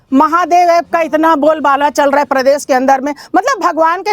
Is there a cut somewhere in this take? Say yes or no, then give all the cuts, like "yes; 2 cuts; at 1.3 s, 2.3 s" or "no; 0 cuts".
no; 0 cuts